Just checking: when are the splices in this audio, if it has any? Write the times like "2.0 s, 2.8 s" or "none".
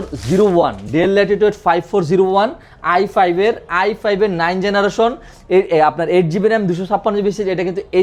none

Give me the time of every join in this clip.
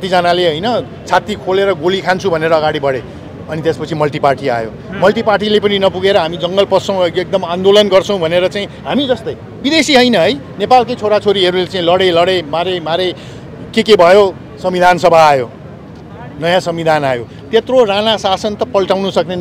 none

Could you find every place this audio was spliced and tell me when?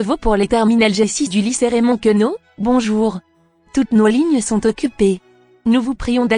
none

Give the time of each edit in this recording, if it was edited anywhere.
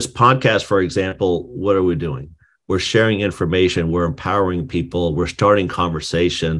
none

